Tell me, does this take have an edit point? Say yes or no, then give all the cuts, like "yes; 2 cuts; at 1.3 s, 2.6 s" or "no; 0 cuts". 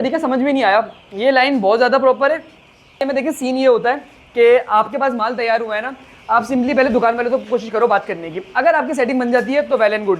yes; 1 cut; at 3.0 s